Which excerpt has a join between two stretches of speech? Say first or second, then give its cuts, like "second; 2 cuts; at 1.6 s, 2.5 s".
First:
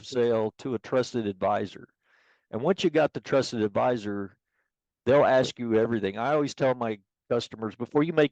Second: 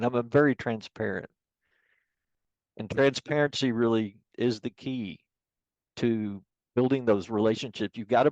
second; 1 cut; at 4.2 s